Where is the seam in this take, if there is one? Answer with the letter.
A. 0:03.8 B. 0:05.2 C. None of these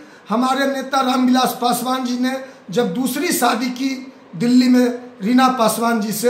C